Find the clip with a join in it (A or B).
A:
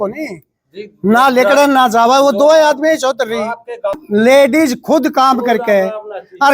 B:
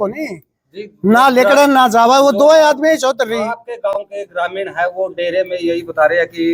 A